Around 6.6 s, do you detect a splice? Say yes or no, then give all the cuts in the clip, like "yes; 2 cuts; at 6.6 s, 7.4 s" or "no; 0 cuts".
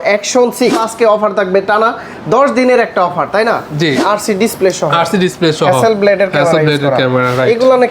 no; 2 cuts; at 0.8 s, 4.0 s